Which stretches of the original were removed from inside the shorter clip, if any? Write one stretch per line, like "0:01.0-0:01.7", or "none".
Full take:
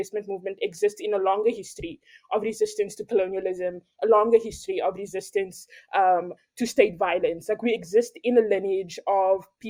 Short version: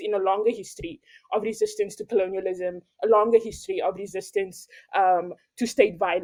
none